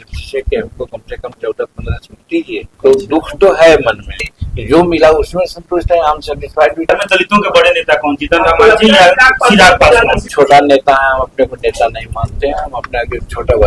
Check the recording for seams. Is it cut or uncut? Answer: cut